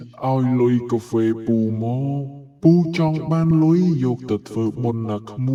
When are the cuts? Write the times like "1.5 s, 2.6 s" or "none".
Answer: none